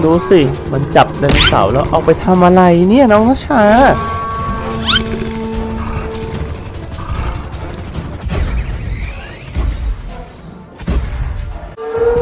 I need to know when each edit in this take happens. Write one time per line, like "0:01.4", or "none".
none